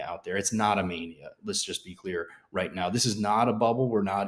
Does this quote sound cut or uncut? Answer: uncut